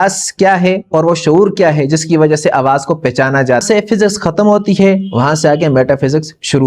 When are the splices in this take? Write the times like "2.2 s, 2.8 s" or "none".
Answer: 3.6 s